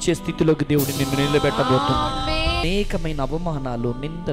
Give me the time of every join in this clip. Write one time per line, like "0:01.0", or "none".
0:02.6